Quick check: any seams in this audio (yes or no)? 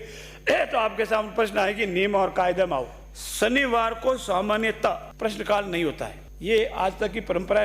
yes